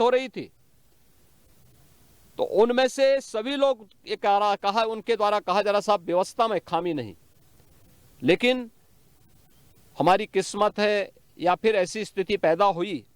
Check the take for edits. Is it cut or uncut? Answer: uncut